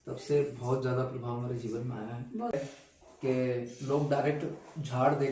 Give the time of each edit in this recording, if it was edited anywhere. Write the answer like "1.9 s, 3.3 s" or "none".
2.5 s